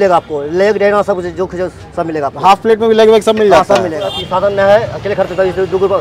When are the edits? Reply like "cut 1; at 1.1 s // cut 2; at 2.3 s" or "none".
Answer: cut 1; at 4.1 s